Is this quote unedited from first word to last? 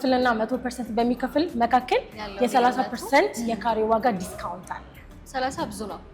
yes; 0 cuts

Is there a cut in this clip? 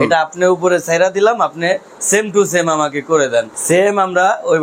yes; 1 cut; at 3.6 s

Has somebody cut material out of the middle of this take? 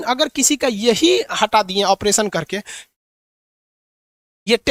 no; 0 cuts

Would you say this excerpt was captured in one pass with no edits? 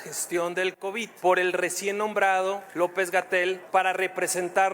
no; 3 cuts; at 1.1 s, 2.7 s, 3.6 s

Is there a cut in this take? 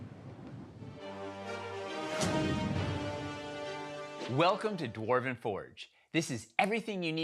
yes; 1 cut; at 0.9 s

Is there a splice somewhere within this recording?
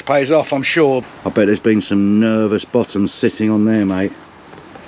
yes; 1 cut; at 1.0 s

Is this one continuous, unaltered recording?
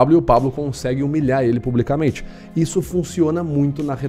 yes; 0 cuts

